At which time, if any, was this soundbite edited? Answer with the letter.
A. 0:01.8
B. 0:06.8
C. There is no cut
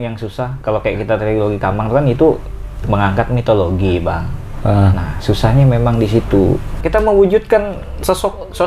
B